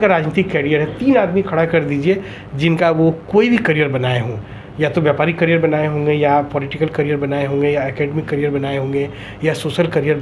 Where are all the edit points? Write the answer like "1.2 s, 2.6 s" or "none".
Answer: none